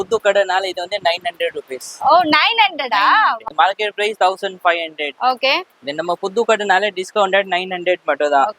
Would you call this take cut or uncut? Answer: cut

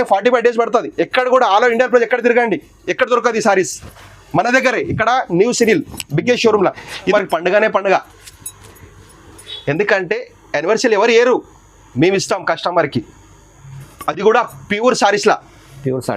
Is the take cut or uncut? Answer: cut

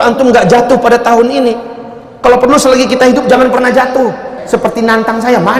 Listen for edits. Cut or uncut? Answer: cut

